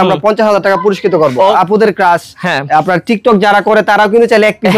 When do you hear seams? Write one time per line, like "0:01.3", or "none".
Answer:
0:01.4